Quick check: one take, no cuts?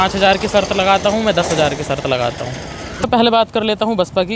no; 1 cut; at 3.1 s

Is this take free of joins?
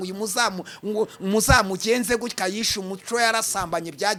yes; 0 cuts

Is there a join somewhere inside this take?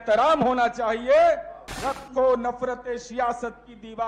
no; 0 cuts

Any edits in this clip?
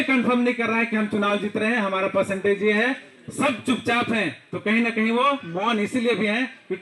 no; 0 cuts

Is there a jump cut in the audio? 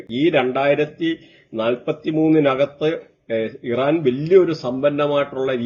no; 0 cuts

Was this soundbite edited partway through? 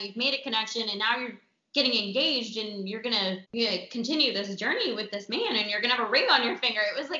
yes; 1 cut; at 3.4 s

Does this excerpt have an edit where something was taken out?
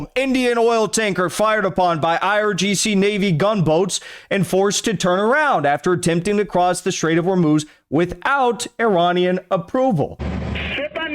yes; 1 cut; at 10.2 s

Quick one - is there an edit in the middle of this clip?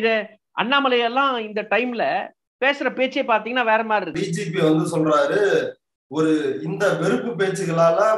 yes; 1 cut; at 4.2 s

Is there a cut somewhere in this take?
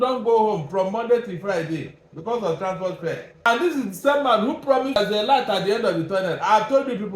yes; 2 cuts; at 3.5 s, 5.0 s

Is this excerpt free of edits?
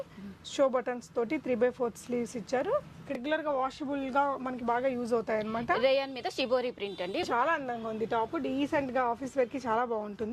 no; 2 cuts; at 3.2 s, 7.2 s

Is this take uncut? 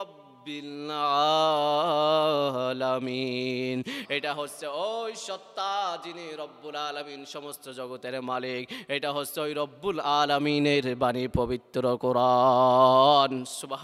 yes; 0 cuts

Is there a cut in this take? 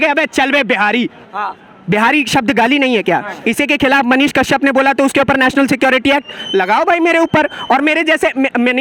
no; 0 cuts

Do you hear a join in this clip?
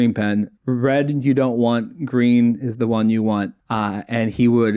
no; 0 cuts

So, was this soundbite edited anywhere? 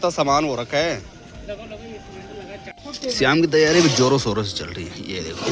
no; 0 cuts

